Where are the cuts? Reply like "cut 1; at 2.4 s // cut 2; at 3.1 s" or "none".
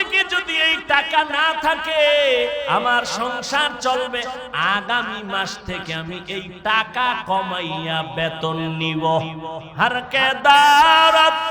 cut 1; at 9.6 s